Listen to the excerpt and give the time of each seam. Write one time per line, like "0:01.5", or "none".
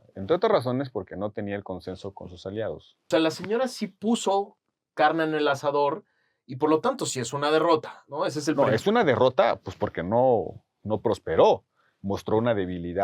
0:02.9